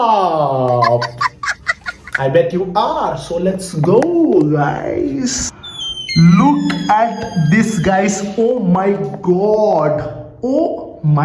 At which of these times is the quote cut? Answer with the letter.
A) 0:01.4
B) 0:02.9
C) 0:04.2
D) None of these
D